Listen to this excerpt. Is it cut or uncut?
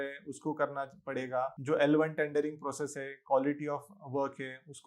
cut